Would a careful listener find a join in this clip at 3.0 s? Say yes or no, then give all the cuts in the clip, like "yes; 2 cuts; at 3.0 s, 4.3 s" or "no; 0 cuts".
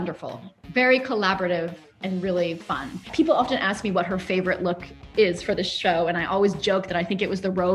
yes; 1 cut; at 3.0 s